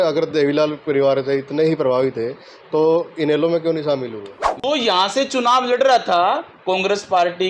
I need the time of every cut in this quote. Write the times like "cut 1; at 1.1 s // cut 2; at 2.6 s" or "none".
cut 1; at 4.6 s